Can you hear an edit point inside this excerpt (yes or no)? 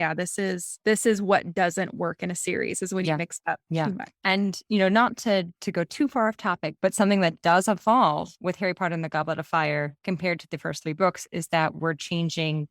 yes